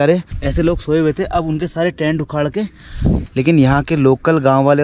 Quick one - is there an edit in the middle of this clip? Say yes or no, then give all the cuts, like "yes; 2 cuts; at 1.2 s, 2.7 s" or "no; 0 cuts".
yes; 1 cut; at 3.3 s